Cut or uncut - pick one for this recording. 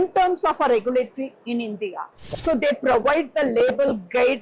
cut